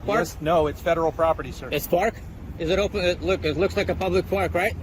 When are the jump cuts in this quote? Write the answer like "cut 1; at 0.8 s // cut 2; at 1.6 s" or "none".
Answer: none